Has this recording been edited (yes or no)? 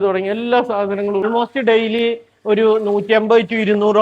yes